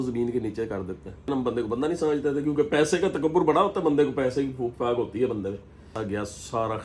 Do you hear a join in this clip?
yes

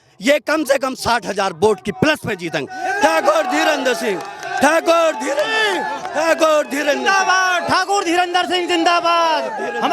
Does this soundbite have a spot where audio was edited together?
no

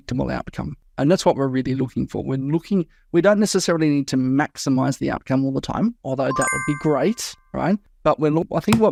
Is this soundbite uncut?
yes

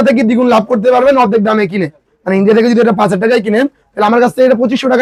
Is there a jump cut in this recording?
no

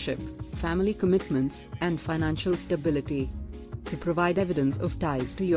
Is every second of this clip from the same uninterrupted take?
no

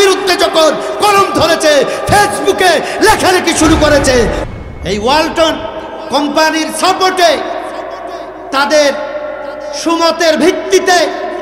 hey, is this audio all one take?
no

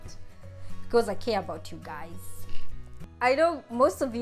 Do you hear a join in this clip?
yes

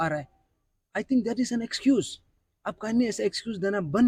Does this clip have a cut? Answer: no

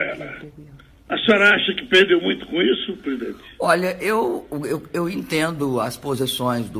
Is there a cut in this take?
yes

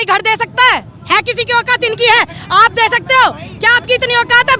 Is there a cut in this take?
no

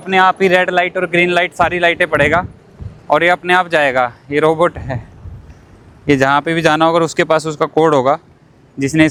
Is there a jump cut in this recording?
no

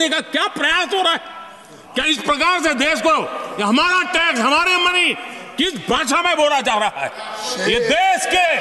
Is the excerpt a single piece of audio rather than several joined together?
yes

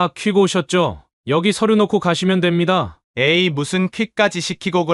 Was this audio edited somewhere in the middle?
yes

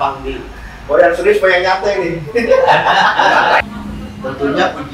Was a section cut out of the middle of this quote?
yes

